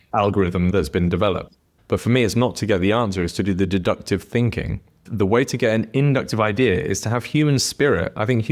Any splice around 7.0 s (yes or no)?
no